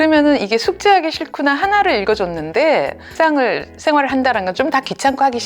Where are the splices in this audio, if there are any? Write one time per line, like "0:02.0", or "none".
0:03.1

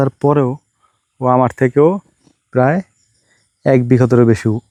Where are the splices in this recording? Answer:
none

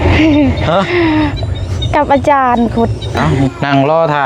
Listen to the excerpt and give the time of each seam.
0:03.2

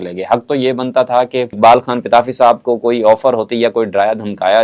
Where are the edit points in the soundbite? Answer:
0:01.5

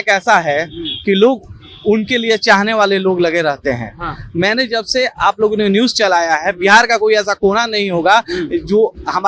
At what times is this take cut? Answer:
none

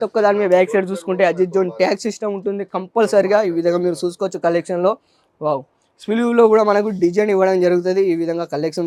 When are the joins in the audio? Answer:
none

